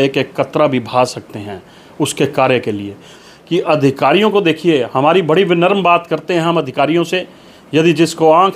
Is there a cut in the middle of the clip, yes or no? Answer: yes